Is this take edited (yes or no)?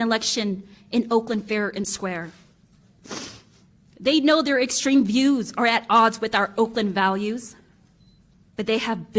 no